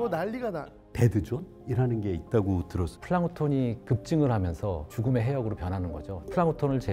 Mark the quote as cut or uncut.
cut